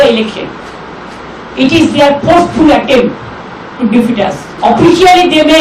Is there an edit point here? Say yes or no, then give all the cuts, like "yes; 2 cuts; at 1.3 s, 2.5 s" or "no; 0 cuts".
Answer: yes; 1 cut; at 4.5 s